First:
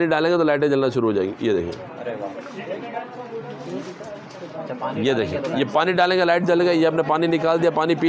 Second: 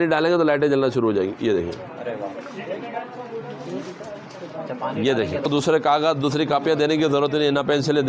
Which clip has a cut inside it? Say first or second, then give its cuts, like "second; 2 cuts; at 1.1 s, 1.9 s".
second; 1 cut; at 5.5 s